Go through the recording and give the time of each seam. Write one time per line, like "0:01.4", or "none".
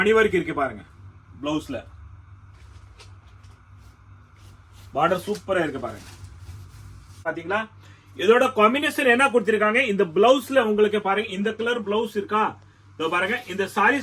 0:07.3